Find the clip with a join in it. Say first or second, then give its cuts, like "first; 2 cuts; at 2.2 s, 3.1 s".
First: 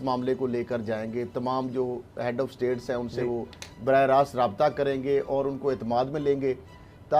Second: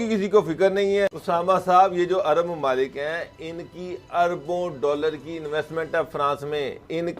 second; 1 cut; at 1.2 s